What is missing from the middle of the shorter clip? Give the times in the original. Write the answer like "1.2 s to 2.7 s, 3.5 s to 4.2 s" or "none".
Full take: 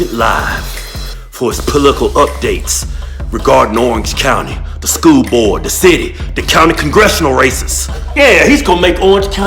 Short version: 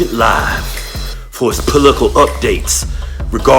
none